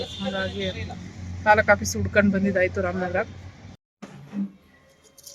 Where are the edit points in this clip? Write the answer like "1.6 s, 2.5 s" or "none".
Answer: 3.8 s